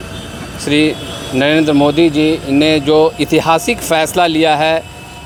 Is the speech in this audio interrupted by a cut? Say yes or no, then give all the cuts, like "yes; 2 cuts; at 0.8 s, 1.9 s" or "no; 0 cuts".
no; 0 cuts